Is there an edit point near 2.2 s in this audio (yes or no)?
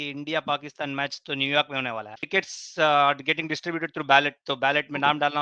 yes